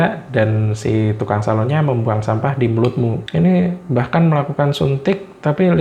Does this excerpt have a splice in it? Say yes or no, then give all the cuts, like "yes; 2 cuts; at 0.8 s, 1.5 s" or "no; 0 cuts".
yes; 1 cut; at 3.2 s